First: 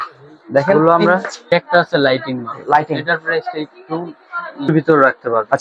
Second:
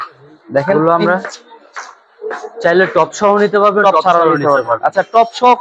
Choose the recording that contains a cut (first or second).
first